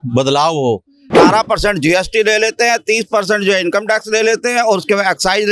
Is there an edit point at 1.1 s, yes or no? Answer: yes